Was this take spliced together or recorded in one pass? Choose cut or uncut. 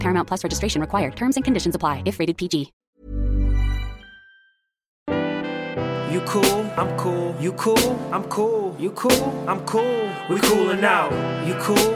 cut